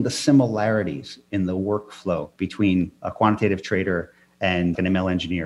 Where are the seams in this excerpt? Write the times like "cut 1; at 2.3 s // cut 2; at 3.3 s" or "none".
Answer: cut 1; at 1.1 s // cut 2; at 2.7 s // cut 3; at 4.8 s